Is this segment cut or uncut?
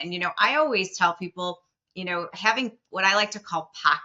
uncut